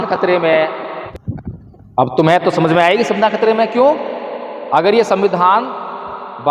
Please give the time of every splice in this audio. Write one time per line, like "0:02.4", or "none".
0:00.9